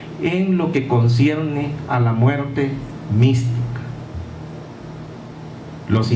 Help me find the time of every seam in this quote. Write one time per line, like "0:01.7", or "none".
0:01.5